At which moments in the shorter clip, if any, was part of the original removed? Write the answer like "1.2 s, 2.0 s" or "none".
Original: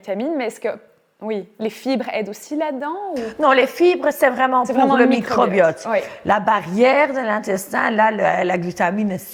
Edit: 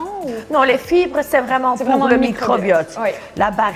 none